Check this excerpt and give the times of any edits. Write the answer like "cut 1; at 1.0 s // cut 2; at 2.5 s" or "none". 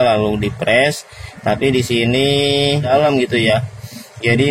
cut 1; at 2.9 s